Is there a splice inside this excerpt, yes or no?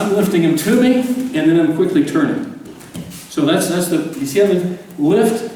no